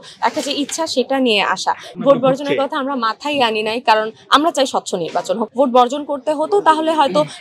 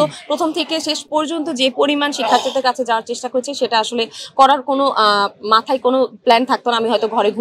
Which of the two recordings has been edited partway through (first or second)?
first